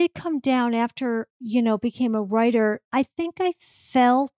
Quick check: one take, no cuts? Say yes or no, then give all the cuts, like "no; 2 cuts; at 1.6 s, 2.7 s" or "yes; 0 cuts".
no; 2 cuts; at 1.3 s, 2.9 s